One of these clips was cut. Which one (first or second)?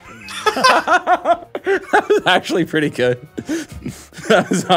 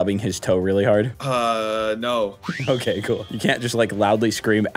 second